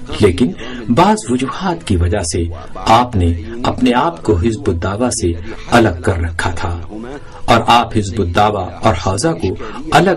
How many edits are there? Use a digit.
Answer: 1